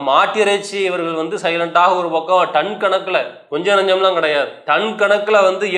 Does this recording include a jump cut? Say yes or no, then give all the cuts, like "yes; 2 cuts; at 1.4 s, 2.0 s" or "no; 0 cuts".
yes; 2 cuts; at 3.4 s, 4.6 s